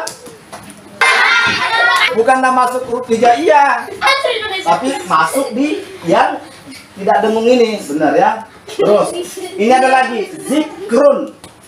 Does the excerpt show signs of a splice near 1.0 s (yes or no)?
yes